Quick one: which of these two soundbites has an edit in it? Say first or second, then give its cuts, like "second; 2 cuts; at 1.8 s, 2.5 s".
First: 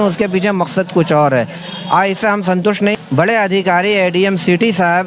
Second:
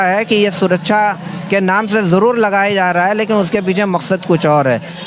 first; 1 cut; at 2.9 s